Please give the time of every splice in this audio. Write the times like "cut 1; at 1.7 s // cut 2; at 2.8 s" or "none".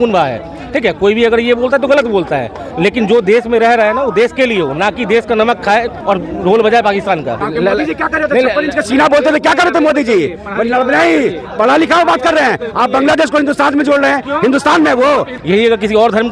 cut 1; at 2.6 s // cut 2; at 6.0 s // cut 3; at 7.4 s // cut 4; at 15.3 s